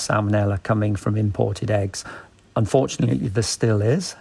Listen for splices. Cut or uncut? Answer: uncut